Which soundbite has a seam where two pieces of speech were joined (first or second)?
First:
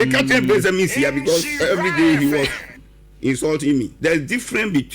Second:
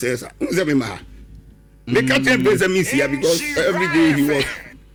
first